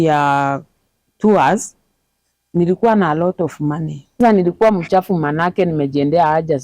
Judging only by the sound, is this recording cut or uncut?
cut